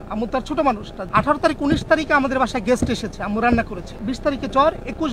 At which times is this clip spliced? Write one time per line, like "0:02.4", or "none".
0:00.9
0:03.9